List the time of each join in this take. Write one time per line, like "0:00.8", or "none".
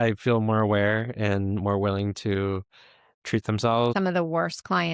0:03.9